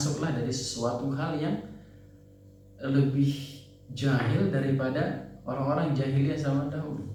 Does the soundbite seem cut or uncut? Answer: uncut